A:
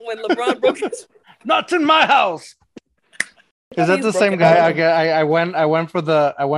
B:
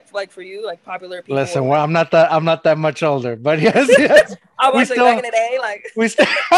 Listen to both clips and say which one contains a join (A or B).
A